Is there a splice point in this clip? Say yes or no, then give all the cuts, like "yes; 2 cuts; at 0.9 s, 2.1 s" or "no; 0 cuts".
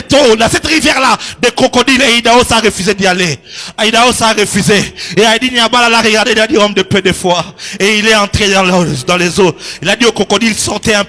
no; 0 cuts